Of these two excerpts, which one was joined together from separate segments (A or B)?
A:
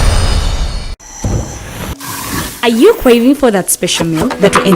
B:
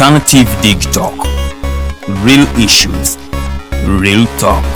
A